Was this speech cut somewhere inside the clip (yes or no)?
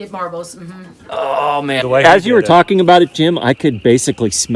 yes